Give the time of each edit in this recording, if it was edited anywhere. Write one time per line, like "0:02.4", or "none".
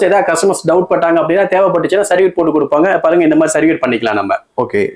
none